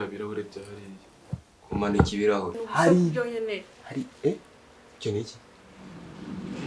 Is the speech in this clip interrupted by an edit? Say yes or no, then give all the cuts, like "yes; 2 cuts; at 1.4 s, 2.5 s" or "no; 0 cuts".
yes; 1 cut; at 2.6 s